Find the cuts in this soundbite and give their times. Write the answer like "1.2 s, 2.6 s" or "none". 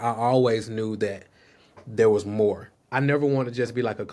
2.7 s